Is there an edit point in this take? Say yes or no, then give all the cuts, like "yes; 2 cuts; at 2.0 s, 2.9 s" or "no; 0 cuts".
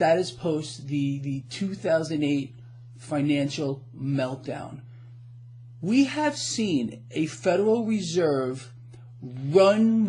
yes; 1 cut; at 4.1 s